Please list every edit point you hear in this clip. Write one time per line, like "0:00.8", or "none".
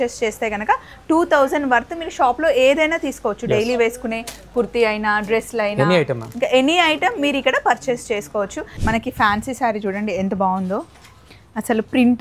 0:08.7